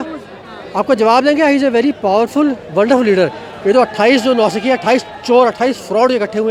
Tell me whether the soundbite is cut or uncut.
uncut